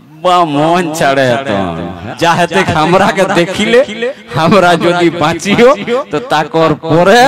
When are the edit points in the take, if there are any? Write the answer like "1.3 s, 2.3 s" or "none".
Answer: 1.9 s